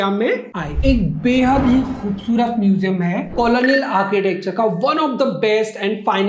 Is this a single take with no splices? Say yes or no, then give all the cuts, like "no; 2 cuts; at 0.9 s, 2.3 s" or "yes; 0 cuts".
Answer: no; 2 cuts; at 0.8 s, 3.3 s